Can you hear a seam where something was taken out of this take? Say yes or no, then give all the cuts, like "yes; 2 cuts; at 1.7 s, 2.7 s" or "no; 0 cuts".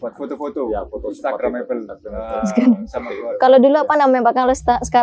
no; 0 cuts